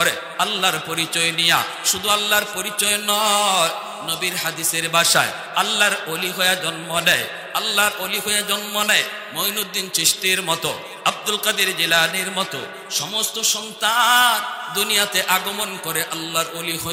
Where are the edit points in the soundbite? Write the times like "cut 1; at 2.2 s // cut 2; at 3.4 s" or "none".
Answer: none